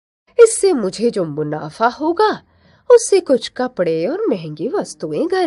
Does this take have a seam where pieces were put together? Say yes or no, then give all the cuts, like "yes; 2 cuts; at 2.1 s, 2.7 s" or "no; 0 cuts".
no; 0 cuts